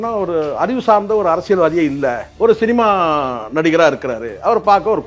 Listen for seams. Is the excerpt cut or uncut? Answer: uncut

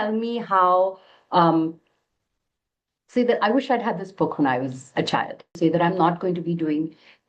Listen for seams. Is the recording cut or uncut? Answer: cut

